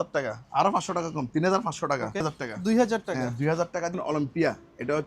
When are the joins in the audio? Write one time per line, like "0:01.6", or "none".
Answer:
0:02.2
0:04.0